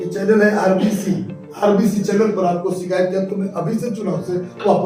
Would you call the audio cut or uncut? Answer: uncut